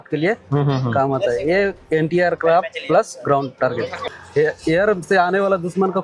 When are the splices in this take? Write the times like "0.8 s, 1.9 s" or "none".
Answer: 4.0 s